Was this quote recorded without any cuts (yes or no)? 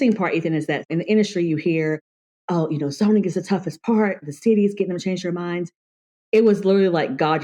no